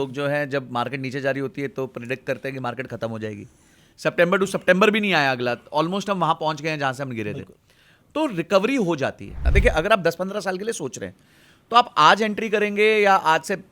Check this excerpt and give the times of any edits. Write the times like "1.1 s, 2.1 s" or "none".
3.8 s, 9.4 s